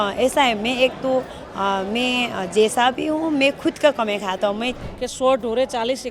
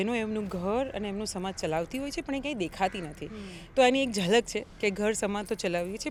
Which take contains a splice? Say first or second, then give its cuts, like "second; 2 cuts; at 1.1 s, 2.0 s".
first; 1 cut; at 4.9 s